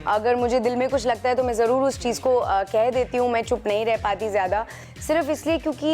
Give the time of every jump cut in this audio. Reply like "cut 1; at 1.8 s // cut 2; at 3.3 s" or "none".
cut 1; at 4.9 s